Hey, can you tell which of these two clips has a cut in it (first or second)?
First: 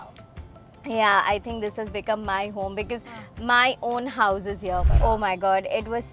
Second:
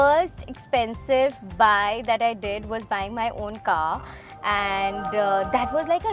first